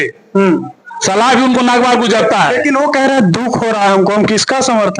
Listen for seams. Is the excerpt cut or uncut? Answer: uncut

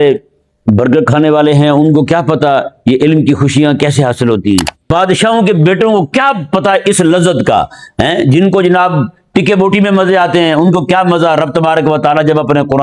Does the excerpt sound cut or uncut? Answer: cut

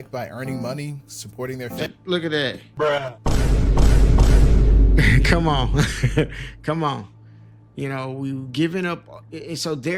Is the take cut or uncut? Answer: uncut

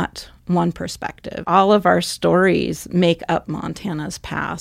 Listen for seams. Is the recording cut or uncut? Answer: cut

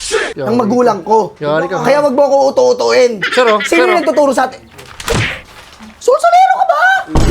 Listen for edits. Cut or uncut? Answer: uncut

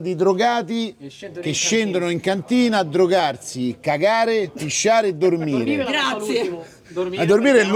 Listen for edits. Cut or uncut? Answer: uncut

